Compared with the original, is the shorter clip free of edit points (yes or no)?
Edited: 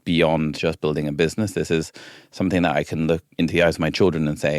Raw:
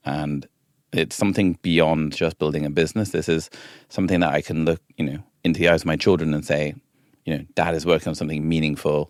no